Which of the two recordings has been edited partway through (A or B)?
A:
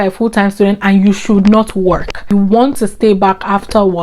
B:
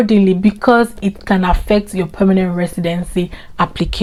A